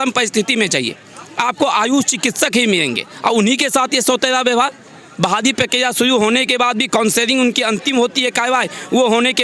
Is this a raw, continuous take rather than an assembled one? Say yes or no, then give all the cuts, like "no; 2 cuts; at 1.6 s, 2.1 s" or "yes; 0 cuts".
yes; 0 cuts